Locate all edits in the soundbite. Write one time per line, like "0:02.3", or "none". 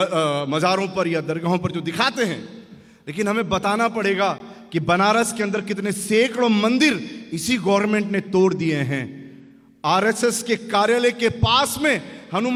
none